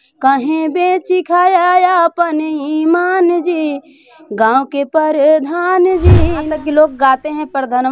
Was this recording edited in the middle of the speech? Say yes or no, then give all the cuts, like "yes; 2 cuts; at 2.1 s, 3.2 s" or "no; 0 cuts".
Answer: yes; 1 cut; at 6.4 s